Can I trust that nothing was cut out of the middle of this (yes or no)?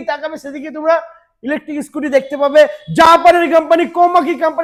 yes